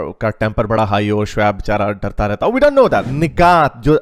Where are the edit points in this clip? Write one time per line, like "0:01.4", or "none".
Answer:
0:03.1